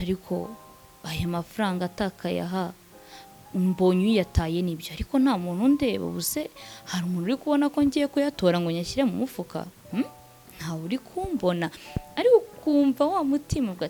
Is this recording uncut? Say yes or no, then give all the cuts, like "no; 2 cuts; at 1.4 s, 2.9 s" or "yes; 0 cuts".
yes; 0 cuts